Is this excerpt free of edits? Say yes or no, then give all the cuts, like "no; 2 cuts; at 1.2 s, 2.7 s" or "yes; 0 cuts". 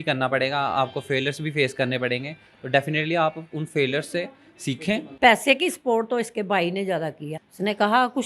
no; 2 cuts; at 5.1 s, 7.3 s